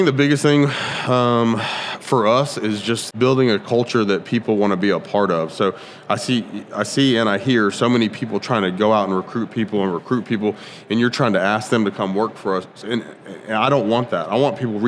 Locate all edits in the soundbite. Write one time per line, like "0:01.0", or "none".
0:03.1